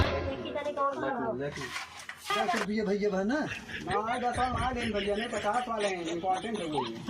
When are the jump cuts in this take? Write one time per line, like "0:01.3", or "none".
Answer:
0:02.3